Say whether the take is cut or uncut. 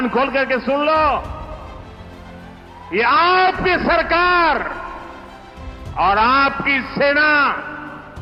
uncut